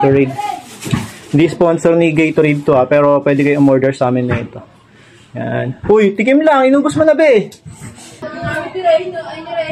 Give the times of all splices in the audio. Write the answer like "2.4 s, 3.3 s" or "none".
8.3 s